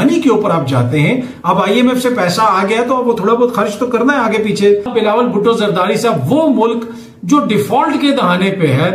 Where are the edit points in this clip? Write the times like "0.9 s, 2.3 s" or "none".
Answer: none